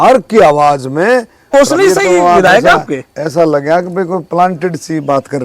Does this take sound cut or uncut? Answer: cut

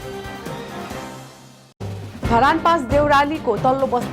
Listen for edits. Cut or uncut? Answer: uncut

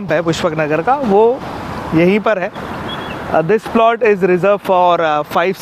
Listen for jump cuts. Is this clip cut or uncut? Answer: uncut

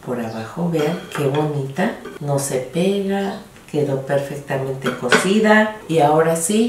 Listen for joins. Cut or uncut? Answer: cut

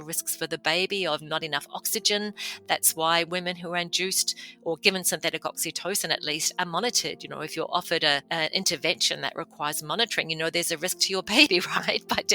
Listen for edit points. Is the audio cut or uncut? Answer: cut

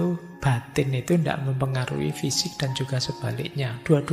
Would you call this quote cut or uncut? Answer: uncut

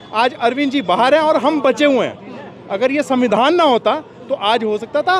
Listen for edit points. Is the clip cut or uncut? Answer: uncut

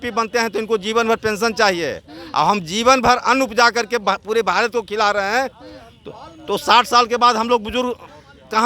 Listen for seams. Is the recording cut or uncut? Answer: uncut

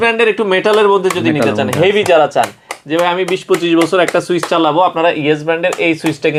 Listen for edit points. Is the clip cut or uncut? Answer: uncut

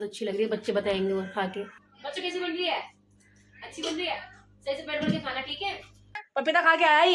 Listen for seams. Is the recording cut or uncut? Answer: cut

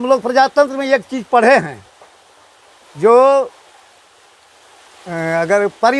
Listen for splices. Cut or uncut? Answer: uncut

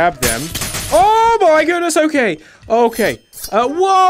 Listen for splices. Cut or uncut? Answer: uncut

